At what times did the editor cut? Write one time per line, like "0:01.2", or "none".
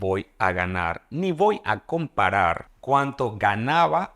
0:02.7